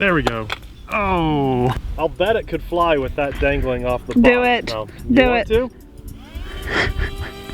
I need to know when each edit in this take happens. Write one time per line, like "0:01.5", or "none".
0:01.8
0:05.7